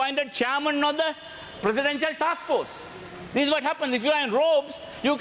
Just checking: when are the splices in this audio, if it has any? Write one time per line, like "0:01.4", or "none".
none